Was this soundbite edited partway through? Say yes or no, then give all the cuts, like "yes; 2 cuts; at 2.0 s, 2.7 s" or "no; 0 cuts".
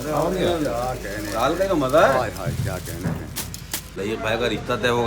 yes; 1 cut; at 3.9 s